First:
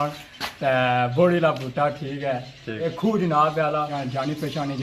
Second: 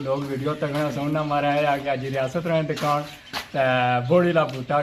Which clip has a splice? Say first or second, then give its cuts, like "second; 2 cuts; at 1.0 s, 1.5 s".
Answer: first; 2 cuts; at 2.9 s, 3.9 s